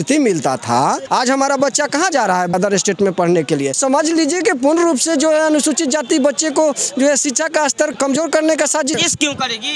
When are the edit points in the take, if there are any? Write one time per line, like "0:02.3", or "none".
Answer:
0:01.0
0:02.5
0:03.8
0:08.0
0:08.9